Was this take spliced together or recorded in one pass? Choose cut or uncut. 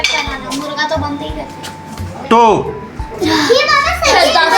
cut